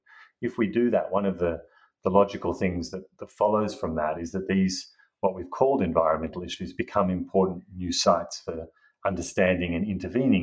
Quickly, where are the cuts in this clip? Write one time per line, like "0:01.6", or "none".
none